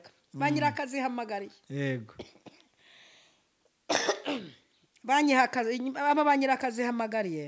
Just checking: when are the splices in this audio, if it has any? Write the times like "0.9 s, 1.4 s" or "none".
none